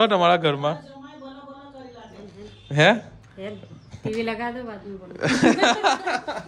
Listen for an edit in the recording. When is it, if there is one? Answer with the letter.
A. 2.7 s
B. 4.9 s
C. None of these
C